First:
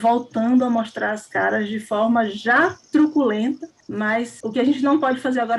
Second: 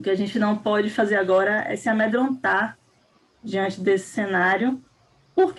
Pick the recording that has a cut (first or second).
first